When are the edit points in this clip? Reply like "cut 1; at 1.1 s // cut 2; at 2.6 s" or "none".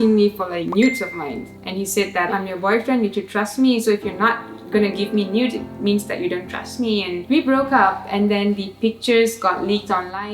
cut 1; at 2.3 s // cut 2; at 7.2 s